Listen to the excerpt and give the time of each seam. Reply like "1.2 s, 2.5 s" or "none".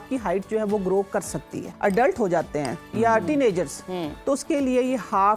1.6 s